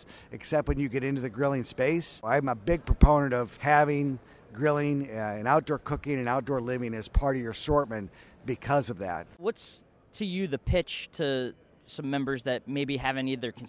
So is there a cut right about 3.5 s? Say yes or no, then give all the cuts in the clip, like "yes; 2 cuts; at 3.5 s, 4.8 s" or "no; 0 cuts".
yes; 3 cuts; at 2.2 s, 3.5 s, 9.4 s